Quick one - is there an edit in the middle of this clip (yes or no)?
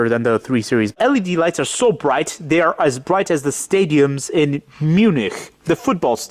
yes